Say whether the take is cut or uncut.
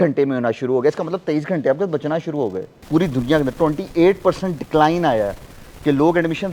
cut